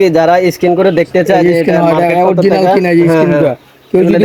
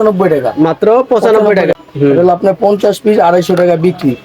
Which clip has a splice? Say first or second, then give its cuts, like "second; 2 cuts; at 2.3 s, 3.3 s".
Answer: second; 1 cut; at 1.8 s